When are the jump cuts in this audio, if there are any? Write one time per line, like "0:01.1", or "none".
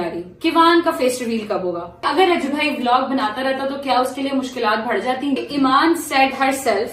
0:02.0
0:05.4

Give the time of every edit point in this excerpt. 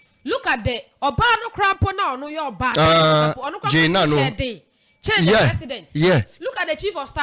none

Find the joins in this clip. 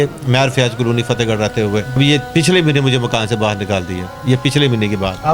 0:02.0

